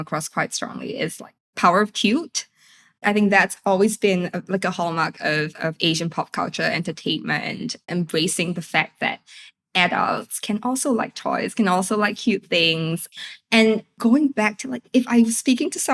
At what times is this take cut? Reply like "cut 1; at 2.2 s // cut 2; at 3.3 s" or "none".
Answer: cut 1; at 1.4 s // cut 2; at 3.0 s // cut 3; at 7.9 s